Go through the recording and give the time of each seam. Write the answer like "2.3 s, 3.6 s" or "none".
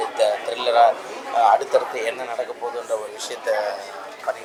none